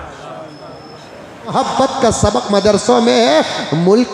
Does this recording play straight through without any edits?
no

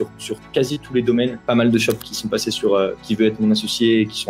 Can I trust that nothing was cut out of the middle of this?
no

